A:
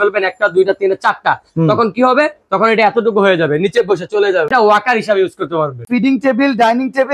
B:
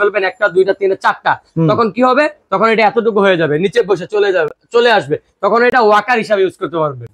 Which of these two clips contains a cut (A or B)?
A